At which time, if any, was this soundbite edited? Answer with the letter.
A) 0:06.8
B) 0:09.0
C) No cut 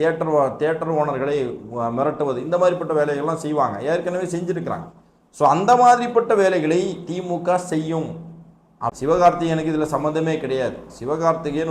B